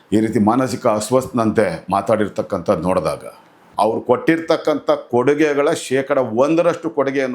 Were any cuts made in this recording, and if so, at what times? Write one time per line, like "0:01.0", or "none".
0:03.6